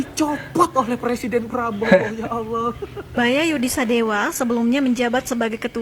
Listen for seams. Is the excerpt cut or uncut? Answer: cut